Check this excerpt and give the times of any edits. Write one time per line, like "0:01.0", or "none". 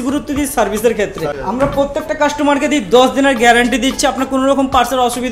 0:01.4